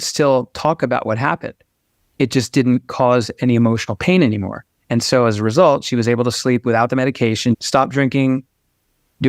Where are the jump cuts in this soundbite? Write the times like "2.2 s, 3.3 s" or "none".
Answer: 7.6 s